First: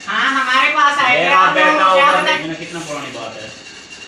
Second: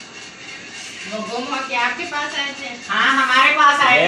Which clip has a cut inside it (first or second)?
first